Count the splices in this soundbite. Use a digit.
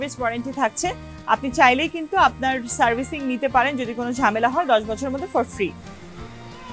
0